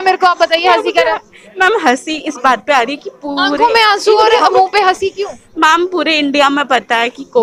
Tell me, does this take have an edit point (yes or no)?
no